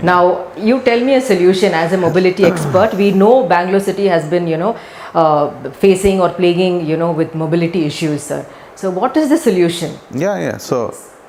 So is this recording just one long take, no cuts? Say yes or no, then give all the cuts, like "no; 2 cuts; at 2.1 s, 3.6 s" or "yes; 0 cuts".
yes; 0 cuts